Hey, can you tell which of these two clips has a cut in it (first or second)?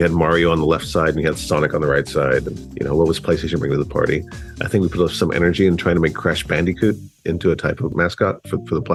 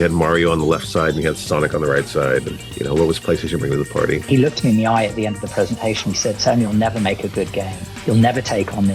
second